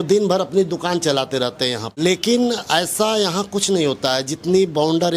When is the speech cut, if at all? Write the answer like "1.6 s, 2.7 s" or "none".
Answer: 2.0 s